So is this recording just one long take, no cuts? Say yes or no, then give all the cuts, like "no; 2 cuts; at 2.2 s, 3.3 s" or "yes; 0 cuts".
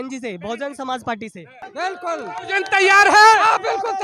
no; 1 cut; at 1.7 s